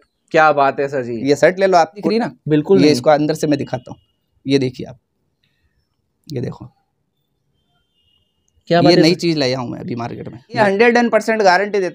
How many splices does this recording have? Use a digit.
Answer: 2